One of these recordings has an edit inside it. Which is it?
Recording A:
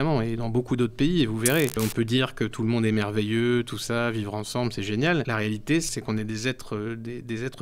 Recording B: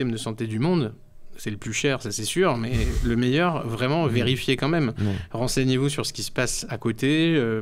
A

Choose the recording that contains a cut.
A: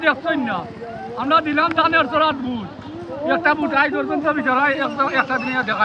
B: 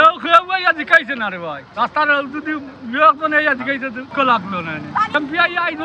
B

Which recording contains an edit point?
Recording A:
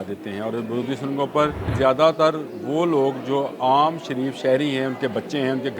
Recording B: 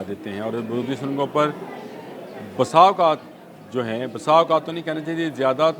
A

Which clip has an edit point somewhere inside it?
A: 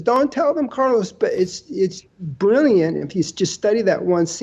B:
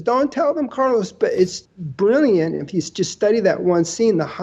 B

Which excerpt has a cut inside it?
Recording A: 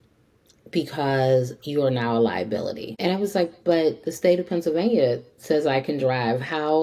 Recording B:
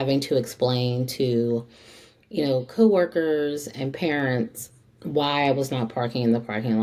A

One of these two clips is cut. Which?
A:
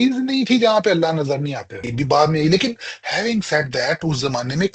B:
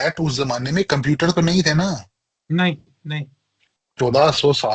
A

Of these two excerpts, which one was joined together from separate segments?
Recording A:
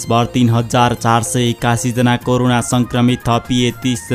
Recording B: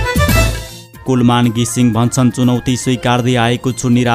B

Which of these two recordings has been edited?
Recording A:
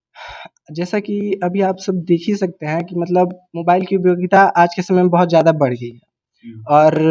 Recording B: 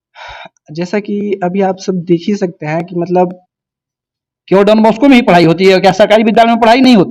B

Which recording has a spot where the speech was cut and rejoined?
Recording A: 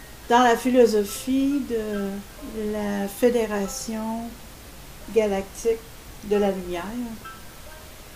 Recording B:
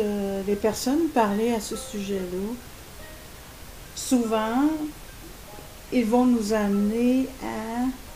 B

